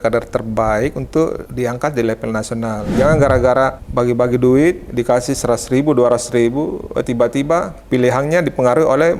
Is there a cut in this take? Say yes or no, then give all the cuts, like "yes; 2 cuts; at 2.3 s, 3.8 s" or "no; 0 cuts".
yes; 4 cuts; at 1.4 s, 2.9 s, 3.8 s, 7.8 s